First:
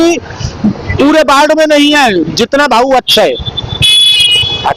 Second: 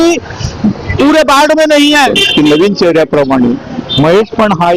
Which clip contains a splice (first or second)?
second